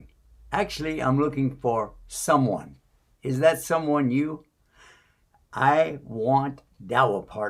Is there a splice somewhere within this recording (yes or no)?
no